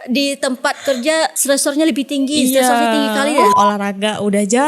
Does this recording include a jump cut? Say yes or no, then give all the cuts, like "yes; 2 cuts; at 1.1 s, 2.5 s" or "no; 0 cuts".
yes; 2 cuts; at 1.4 s, 3.5 s